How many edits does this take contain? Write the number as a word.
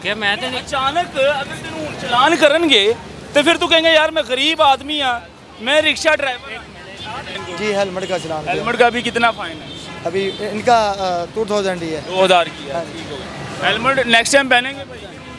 one